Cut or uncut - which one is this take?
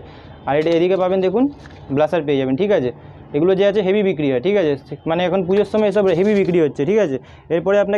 uncut